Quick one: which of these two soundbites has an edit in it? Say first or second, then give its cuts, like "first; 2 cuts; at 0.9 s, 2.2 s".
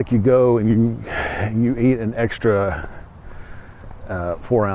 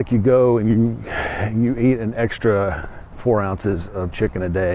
second; 1 cut; at 3.2 s